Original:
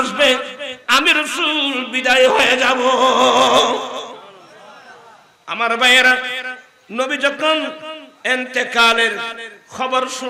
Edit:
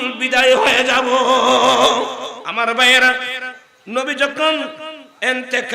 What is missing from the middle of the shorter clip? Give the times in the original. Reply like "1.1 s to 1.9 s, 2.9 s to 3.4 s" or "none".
4.1 s to 5.4 s